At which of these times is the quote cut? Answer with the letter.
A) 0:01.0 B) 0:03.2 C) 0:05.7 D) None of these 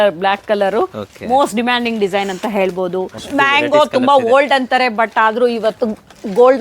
B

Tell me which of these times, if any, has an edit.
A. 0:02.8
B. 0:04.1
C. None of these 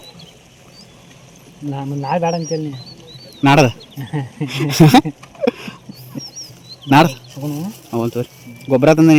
C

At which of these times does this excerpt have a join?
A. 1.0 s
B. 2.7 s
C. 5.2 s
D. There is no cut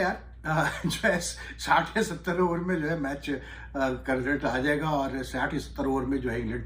D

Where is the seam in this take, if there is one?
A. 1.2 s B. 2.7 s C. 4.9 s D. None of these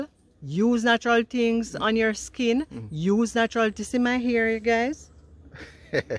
D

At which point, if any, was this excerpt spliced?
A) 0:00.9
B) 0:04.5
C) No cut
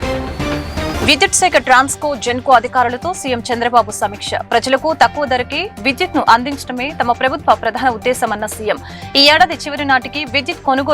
A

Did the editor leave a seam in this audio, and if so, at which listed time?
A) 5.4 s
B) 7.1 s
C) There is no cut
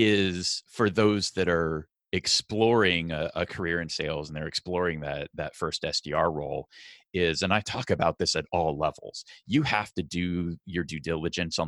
C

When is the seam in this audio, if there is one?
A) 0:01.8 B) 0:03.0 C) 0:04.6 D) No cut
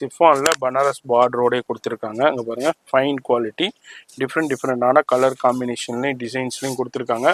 D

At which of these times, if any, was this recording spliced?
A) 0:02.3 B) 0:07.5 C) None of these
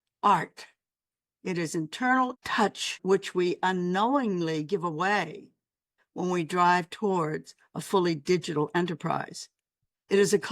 A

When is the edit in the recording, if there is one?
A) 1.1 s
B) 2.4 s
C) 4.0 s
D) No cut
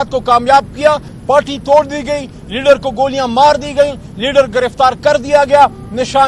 A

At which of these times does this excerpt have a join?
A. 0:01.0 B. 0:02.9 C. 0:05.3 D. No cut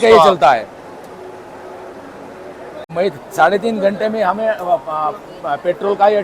B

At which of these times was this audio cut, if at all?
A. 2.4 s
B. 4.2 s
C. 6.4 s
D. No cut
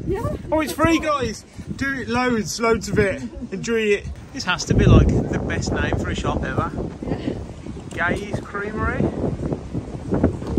B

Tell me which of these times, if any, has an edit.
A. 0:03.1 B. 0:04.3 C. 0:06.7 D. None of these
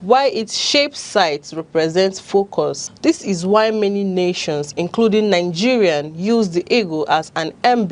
C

